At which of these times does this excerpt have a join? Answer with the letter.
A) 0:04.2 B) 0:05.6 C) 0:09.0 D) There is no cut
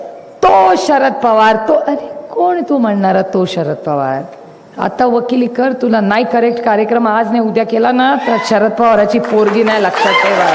D